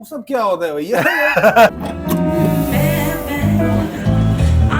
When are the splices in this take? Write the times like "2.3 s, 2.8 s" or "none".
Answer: 1.9 s